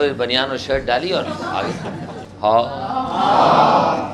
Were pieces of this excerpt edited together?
yes; 1 cut; at 2.2 s

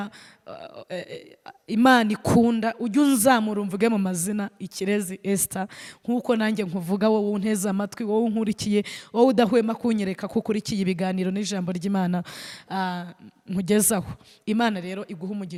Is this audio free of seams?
yes; 0 cuts

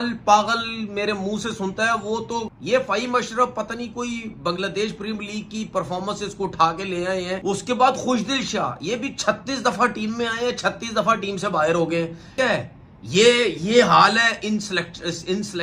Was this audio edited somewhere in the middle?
yes; 3 cuts; at 2.5 s, 7.4 s, 12.3 s

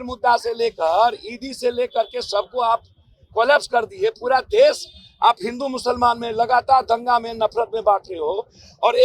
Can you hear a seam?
no; 0 cuts

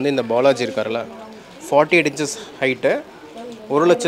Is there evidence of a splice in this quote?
no; 0 cuts

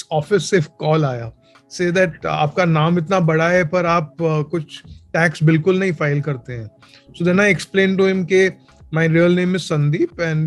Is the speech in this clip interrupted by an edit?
no; 0 cuts

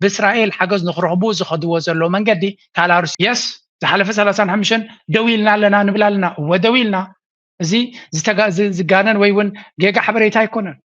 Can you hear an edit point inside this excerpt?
yes; 1 cut; at 3.1 s

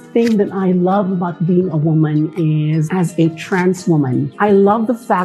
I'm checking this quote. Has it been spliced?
no; 0 cuts

